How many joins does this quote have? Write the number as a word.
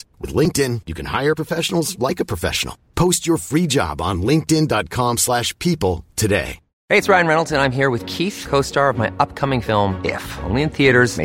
zero